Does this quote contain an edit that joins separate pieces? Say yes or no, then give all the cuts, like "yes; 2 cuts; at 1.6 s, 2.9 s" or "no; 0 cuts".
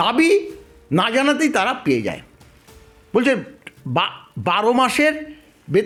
no; 0 cuts